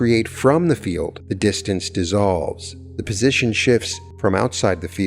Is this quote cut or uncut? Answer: cut